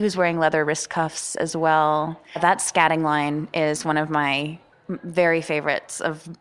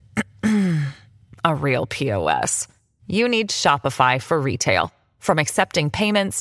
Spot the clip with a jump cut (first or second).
first